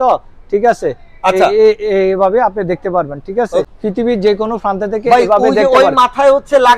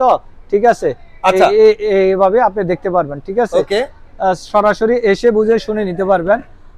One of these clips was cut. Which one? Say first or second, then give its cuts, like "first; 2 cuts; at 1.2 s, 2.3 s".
first; 1 cut; at 3.7 s